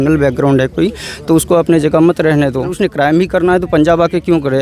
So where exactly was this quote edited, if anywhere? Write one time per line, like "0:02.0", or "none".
0:02.7